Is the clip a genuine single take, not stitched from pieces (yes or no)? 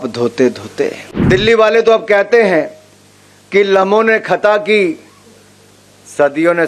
no